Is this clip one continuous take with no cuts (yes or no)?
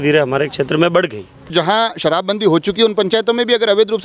no